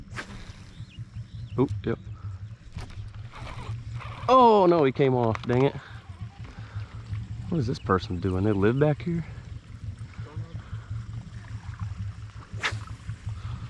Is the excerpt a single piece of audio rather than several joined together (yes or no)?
yes